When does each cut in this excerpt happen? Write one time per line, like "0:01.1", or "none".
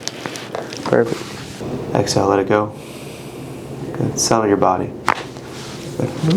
0:01.6